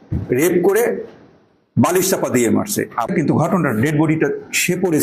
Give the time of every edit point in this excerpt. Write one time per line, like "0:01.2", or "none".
0:03.1